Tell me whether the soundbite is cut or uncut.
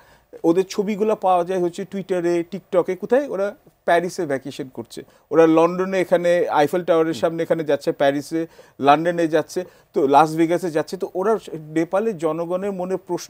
uncut